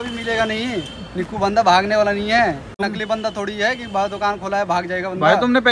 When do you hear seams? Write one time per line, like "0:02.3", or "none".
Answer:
0:02.7